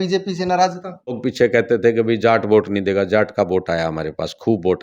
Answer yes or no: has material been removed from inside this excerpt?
yes